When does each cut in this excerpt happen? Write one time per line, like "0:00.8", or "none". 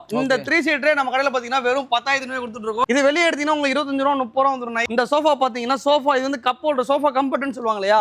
0:02.8
0:04.9